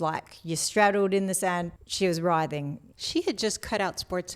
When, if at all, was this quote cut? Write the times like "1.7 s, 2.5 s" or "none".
1.7 s, 2.8 s

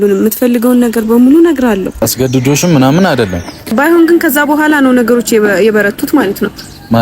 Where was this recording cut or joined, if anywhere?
2.0 s, 3.7 s

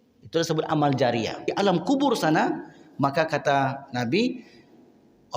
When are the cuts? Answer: 1.5 s

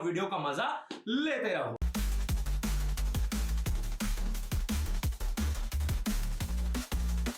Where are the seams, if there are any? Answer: 1.8 s

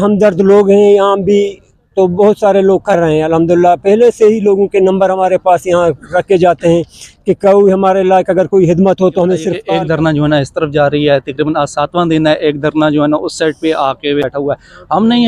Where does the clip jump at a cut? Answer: 9.5 s, 14.3 s

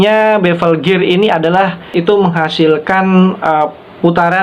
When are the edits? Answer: 1.8 s

